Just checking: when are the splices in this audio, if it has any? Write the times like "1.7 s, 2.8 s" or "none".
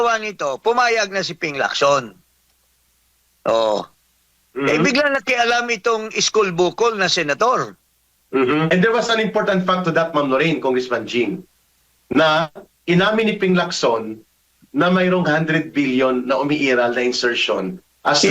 8.7 s